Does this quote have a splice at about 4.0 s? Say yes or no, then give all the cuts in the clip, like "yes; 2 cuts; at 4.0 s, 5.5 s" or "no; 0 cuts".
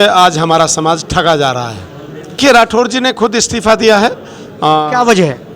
no; 1 cut; at 2.4 s